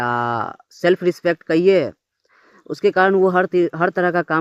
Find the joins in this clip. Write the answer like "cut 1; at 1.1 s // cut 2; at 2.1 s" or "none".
none